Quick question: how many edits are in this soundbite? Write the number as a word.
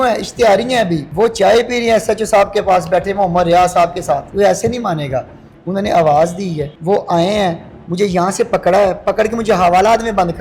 three